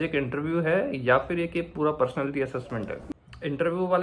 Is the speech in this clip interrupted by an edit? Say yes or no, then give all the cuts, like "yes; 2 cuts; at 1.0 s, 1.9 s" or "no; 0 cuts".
yes; 1 cut; at 3.0 s